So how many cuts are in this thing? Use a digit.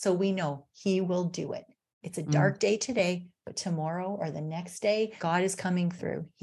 1